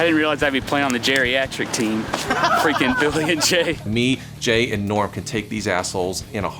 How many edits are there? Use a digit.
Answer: 1